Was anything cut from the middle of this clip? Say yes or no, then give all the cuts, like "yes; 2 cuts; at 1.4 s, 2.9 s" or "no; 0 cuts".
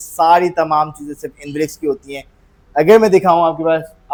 no; 0 cuts